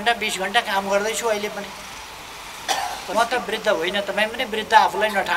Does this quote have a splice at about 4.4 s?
no; 1 cut; at 3.1 s

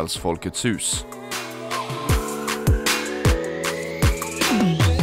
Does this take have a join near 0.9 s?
yes; 1 cut; at 0.9 s

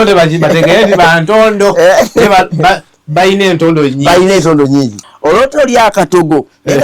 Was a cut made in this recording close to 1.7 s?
no; 1 cut; at 5.0 s

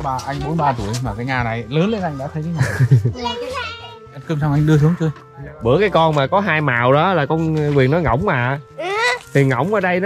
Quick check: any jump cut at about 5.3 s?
yes; 2 cuts; at 3.9 s, 5.3 s

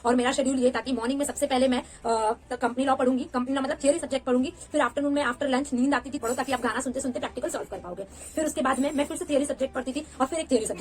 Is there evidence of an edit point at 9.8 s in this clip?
no; 1 cut; at 6.2 s

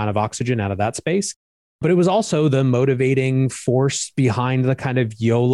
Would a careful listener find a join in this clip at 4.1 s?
no; 0 cuts

